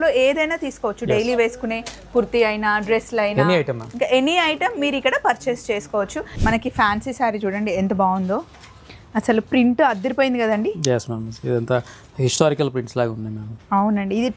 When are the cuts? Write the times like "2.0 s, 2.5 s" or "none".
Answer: 6.2 s